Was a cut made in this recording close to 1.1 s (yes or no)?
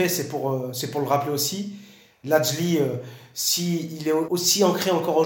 no